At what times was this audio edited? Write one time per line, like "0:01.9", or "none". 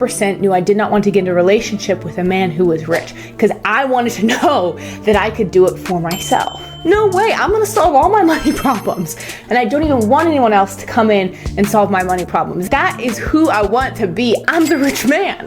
0:06.6
0:09.3
0:12.6
0:14.5